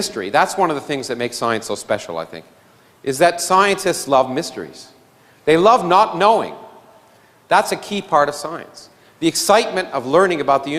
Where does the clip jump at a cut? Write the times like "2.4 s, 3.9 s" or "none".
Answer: none